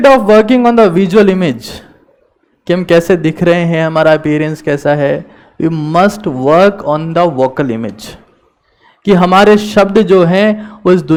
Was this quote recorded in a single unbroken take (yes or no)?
yes